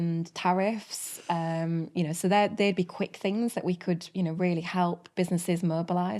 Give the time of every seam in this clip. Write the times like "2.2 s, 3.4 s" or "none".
none